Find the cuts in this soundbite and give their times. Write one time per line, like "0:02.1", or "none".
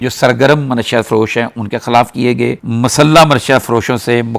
0:02.6